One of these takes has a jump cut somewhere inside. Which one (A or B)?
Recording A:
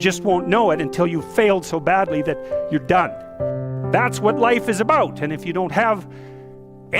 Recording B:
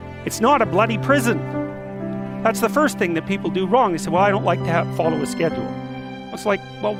A